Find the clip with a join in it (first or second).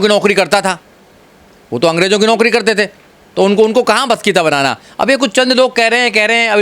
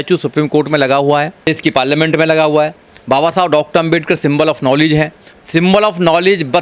second